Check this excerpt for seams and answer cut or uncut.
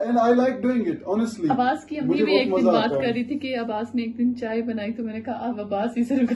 uncut